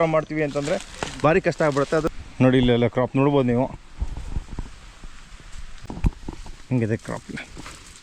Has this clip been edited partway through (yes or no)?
yes